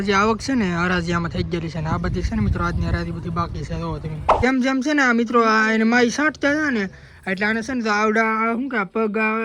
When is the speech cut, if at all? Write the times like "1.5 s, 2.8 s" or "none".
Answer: 4.4 s

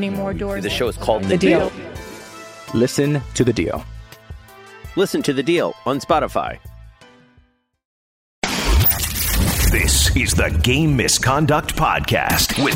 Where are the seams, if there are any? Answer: 8.3 s

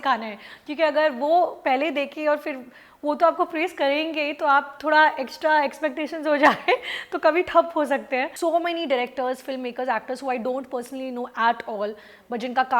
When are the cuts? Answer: 8.3 s

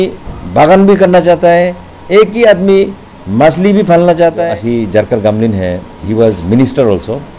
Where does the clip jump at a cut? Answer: 4.4 s

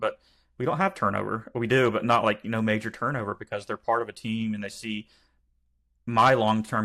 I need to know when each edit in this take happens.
none

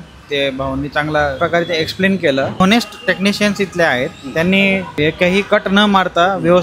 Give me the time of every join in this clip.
1.4 s, 2.6 s, 4.9 s

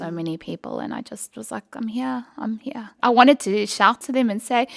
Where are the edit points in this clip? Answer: 2.9 s

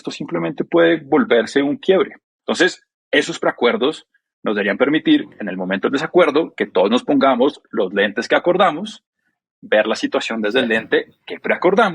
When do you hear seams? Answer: 2.3 s

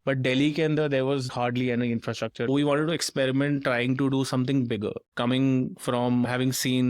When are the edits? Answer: 1.3 s, 2.5 s, 5.1 s

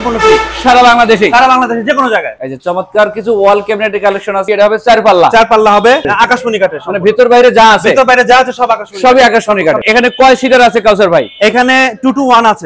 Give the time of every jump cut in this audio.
2.4 s, 4.5 s, 6.1 s, 9.8 s

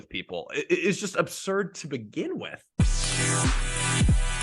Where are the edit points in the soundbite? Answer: 2.7 s

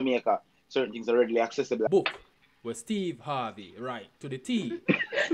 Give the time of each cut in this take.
1.9 s

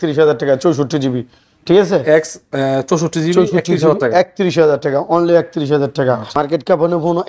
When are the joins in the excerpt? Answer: 6.3 s

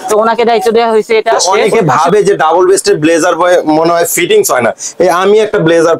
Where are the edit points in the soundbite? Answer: 1.4 s

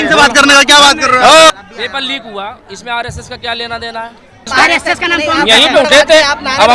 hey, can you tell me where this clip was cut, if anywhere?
1.5 s, 4.5 s

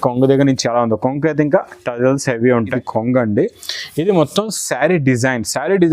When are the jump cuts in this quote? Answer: 2.8 s

